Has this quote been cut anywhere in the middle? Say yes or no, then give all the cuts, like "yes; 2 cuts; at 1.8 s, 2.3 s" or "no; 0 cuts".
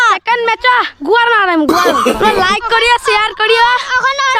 yes; 1 cut; at 2.1 s